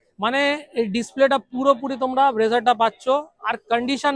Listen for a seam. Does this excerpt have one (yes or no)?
no